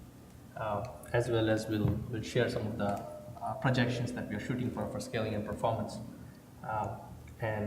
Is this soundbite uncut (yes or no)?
no